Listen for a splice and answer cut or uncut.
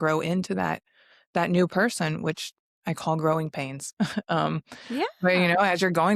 uncut